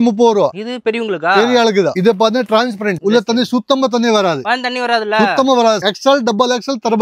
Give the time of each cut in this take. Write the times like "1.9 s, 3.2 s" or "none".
2.0 s, 5.8 s